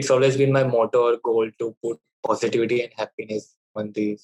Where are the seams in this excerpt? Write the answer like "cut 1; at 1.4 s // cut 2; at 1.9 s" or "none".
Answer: none